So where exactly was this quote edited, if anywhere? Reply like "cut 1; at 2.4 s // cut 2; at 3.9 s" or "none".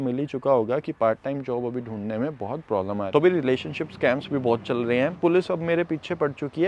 cut 1; at 3.1 s // cut 2; at 5.2 s